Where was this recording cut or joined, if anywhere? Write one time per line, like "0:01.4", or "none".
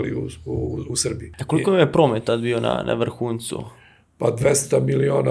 0:01.3